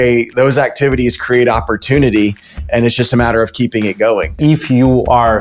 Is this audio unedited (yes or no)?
no